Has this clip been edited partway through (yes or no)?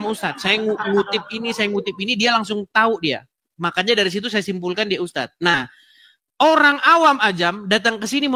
no